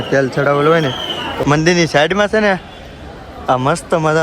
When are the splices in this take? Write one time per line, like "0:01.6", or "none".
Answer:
0:01.4